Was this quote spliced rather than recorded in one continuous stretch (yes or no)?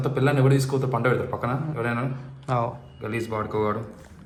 no